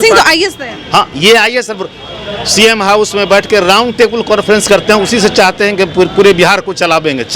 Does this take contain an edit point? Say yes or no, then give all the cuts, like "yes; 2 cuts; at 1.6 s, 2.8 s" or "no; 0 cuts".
yes; 1 cut; at 1.8 s